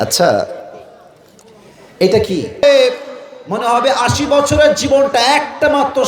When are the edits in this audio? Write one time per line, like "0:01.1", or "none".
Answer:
0:02.6